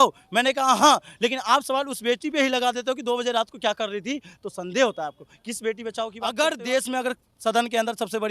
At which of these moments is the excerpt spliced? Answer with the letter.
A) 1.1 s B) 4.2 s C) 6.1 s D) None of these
C